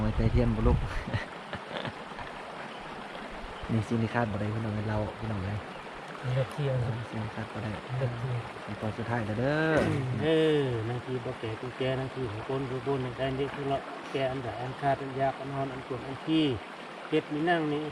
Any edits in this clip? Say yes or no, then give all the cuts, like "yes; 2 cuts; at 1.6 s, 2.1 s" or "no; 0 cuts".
no; 0 cuts